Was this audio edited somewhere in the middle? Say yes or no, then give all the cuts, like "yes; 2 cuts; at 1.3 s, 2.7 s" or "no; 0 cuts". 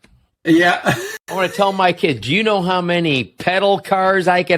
no; 0 cuts